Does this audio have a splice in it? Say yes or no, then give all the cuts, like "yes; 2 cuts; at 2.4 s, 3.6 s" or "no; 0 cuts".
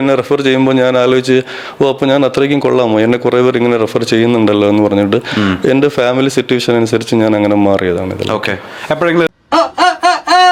no; 0 cuts